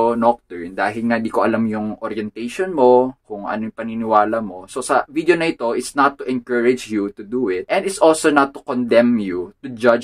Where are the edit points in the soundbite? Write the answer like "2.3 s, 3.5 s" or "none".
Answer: none

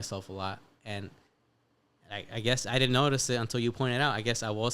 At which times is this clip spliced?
none

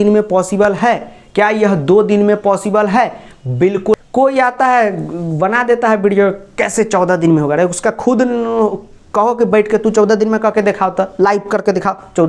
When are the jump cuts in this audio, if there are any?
4.0 s

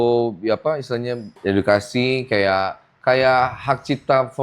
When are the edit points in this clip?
1.3 s

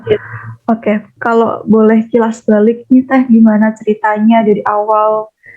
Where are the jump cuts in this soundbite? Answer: 1.1 s

